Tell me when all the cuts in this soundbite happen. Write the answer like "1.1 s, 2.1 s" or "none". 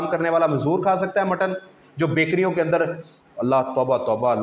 1.8 s

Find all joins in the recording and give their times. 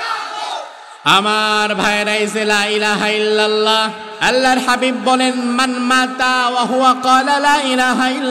4.0 s

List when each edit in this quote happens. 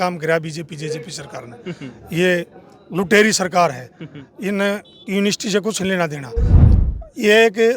6.6 s

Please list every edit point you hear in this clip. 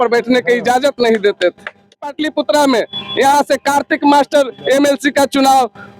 2.1 s

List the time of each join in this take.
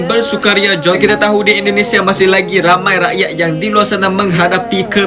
1.0 s

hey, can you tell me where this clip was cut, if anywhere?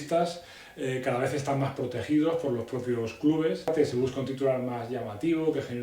3.7 s

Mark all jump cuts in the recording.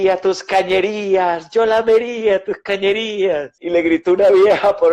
3.6 s

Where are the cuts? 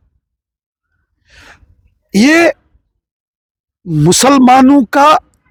none

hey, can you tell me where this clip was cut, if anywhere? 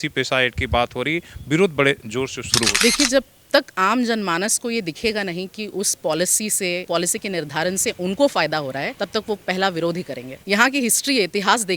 10.4 s

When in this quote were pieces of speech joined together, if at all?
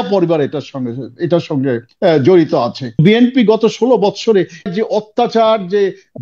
1.9 s, 3.0 s, 4.7 s

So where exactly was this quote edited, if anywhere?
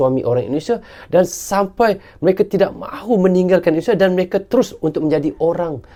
none

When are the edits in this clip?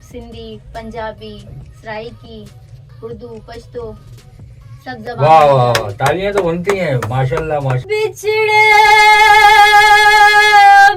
7.8 s

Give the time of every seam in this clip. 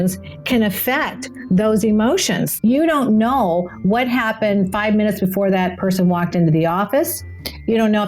2.5 s

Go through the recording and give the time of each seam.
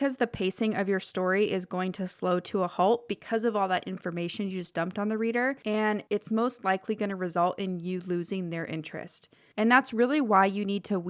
5.9 s

